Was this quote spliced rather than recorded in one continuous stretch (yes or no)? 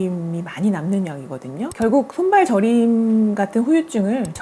yes